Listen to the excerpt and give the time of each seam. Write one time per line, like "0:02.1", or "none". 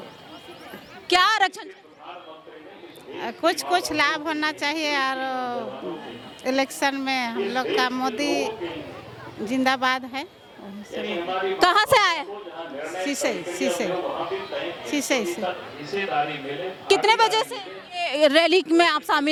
none